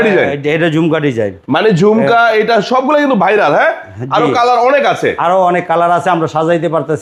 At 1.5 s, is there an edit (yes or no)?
no